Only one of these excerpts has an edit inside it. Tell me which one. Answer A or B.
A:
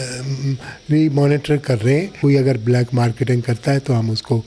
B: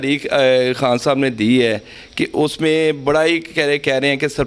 A